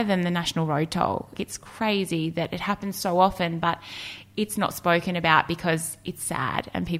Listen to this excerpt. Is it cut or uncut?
cut